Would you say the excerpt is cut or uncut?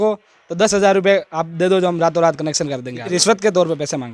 cut